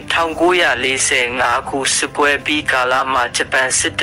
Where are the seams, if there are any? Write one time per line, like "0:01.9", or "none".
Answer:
none